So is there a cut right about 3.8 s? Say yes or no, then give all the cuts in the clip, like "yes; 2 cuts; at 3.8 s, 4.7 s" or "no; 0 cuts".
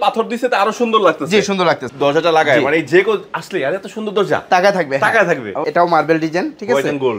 no; 2 cuts; at 1.9 s, 5.6 s